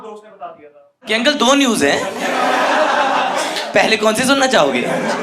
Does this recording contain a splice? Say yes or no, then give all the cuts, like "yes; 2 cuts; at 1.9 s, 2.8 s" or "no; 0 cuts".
yes; 1 cut; at 1.0 s